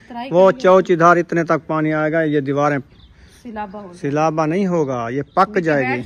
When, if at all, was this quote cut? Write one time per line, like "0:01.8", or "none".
none